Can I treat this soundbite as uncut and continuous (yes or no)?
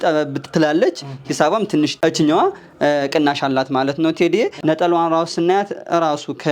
no